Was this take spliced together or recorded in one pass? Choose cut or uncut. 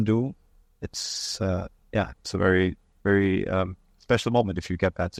uncut